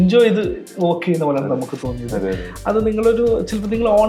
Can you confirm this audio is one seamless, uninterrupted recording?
yes; 0 cuts

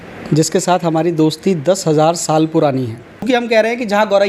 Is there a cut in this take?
yes; 1 cut; at 3.3 s

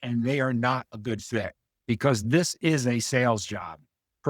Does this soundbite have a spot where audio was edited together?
yes; 1 cut; at 1.6 s

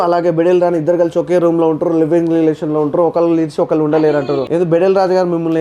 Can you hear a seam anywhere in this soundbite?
yes; 1 cut; at 4.4 s

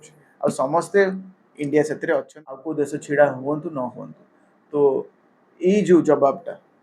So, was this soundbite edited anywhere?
yes; 1 cut; at 2.7 s

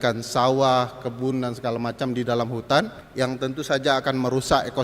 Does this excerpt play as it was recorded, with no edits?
no; 1 cut; at 3.0 s

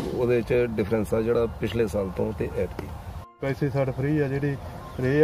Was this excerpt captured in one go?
no; 1 cut; at 3.4 s

